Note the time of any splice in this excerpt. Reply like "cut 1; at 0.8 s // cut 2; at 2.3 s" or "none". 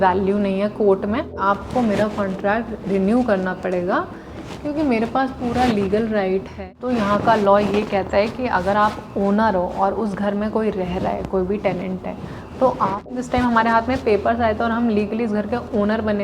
cut 1; at 1.4 s // cut 2; at 6.6 s // cut 3; at 13.2 s